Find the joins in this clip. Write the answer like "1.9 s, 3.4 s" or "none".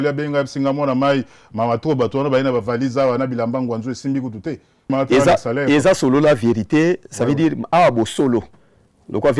4.9 s